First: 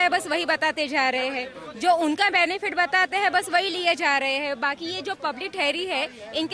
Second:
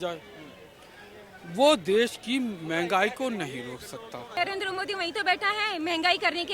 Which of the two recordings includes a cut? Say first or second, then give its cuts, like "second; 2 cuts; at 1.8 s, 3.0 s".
second; 1 cut; at 4.4 s